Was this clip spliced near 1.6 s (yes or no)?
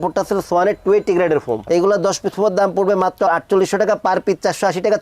yes